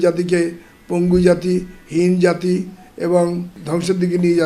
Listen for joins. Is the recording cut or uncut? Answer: cut